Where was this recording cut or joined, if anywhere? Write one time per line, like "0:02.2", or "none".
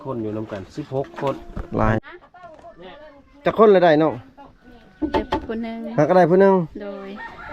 0:02.0